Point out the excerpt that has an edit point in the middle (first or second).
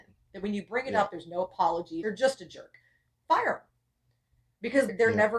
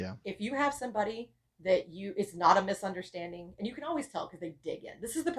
first